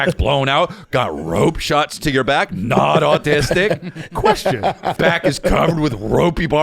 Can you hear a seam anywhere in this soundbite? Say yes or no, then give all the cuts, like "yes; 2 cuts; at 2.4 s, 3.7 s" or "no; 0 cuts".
yes; 1 cut; at 4.9 s